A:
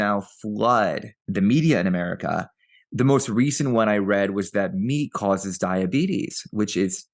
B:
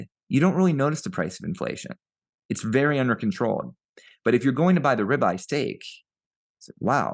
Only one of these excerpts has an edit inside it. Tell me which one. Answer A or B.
A